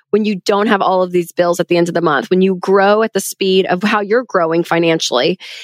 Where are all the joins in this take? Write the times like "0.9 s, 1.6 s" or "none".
3.8 s